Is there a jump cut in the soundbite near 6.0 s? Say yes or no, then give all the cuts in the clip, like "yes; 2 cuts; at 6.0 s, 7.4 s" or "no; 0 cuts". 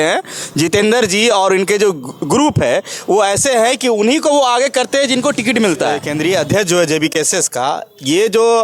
yes; 1 cut; at 6.0 s